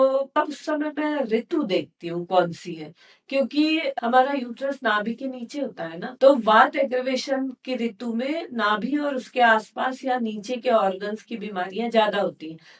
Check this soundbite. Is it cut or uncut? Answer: uncut